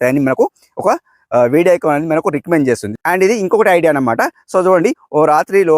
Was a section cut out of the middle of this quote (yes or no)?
yes